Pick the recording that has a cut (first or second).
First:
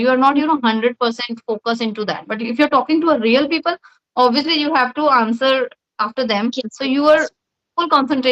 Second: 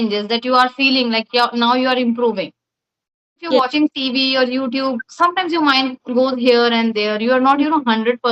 second